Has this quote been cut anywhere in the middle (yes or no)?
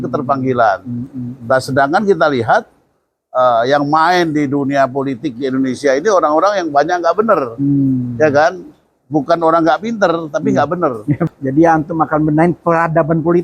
yes